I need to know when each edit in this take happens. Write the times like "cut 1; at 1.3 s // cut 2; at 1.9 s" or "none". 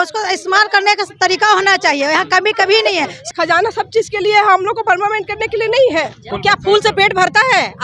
cut 1; at 3.2 s // cut 2; at 6.3 s